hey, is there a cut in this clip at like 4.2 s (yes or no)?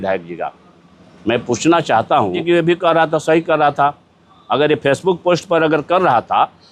no